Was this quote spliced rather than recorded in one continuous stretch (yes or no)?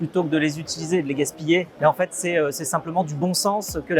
yes